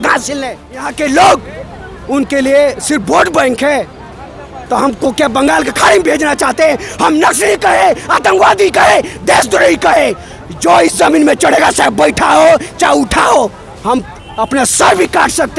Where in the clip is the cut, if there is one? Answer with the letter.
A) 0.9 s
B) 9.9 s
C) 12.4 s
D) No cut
A